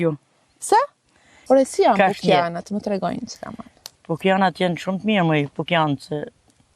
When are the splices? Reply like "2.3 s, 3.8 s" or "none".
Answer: 1.4 s